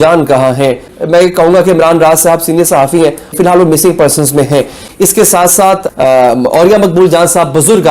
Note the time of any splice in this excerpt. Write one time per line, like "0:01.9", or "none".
0:00.8
0:03.3
0:04.8

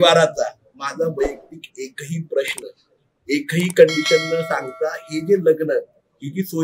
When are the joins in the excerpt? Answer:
none

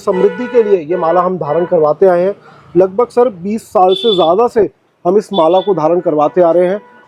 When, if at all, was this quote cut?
none

